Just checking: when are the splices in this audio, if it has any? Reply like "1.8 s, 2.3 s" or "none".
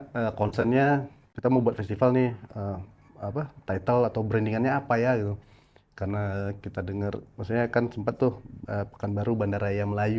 1.3 s